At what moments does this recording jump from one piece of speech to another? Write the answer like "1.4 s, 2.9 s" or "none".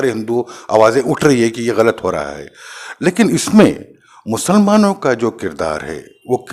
none